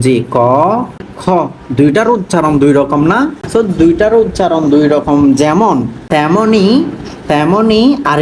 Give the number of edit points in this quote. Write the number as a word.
three